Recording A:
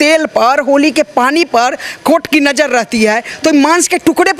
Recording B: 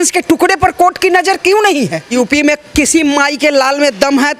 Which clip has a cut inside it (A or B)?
B